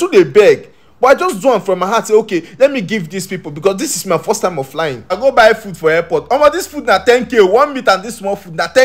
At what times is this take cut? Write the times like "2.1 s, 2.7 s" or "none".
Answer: 5.2 s